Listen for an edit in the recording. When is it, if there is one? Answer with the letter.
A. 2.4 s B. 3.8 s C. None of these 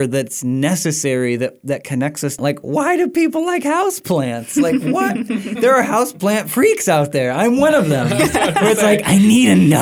A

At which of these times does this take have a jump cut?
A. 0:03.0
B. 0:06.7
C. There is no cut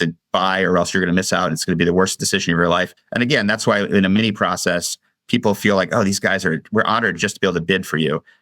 A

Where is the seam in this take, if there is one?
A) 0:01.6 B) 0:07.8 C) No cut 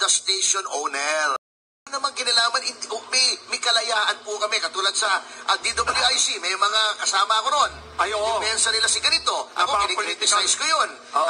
A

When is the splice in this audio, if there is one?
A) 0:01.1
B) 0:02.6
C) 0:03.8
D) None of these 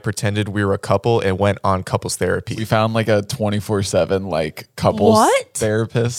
B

